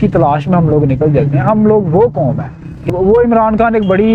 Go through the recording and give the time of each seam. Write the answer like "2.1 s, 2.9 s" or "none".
2.9 s